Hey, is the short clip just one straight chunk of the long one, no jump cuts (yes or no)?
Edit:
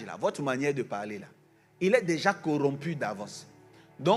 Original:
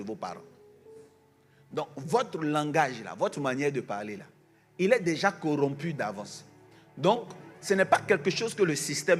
yes